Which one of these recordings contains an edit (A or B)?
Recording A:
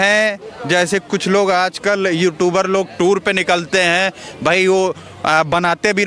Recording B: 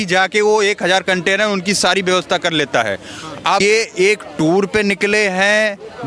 B